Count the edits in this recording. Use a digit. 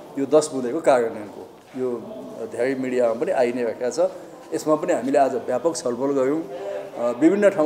0